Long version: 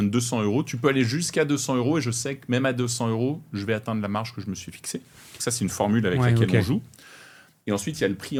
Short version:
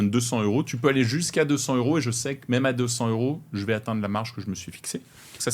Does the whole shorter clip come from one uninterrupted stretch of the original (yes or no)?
yes